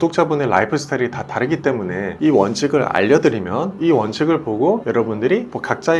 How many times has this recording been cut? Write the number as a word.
one